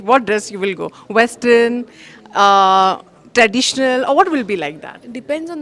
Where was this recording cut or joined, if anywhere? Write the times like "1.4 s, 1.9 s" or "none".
none